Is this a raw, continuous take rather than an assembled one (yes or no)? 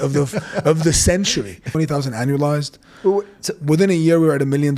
no